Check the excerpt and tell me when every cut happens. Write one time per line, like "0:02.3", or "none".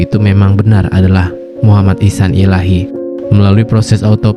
0:03.0